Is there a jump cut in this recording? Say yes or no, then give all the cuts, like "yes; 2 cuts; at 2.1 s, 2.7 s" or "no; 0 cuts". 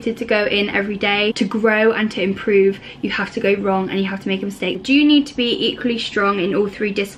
yes; 2 cuts; at 1.3 s, 4.8 s